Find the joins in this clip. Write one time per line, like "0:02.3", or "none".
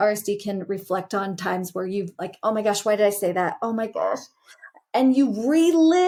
none